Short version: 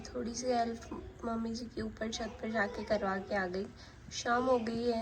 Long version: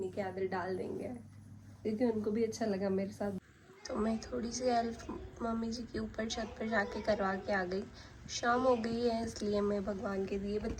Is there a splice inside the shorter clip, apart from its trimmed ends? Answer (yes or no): no